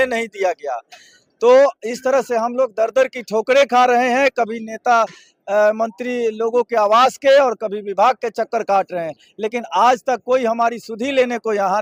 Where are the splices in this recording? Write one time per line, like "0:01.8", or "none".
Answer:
none